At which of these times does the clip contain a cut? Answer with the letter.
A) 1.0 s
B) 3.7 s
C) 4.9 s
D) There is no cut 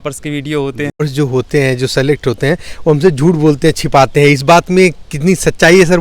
A